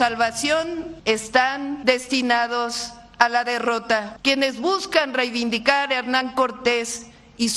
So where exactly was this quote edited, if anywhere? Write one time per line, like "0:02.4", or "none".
0:00.9
0:01.8
0:04.1